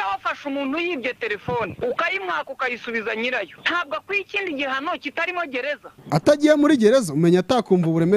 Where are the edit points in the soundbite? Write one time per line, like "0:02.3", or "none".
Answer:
0:01.7
0:03.6
0:05.9